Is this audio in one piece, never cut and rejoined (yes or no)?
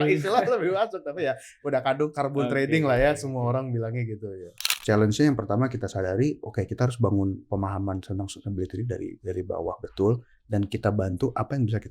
no